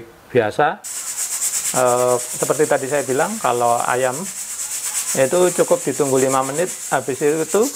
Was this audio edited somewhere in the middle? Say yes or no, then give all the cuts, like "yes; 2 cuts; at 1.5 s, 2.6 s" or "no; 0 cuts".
yes; 1 cut; at 0.9 s